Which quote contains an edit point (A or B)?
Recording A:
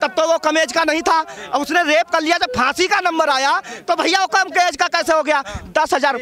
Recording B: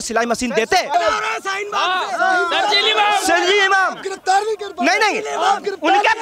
B